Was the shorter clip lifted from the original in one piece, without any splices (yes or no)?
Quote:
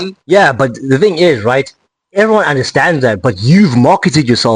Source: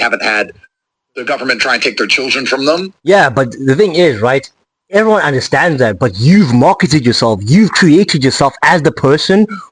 yes